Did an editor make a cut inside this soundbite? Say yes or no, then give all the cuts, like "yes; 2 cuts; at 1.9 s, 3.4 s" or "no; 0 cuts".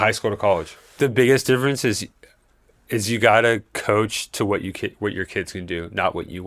yes; 1 cut; at 1.0 s